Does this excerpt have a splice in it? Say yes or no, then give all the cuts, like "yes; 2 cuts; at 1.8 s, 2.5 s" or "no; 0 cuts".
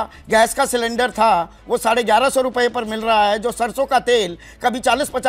no; 0 cuts